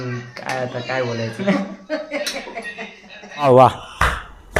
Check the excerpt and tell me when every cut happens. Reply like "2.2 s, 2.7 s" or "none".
1.4 s, 3.4 s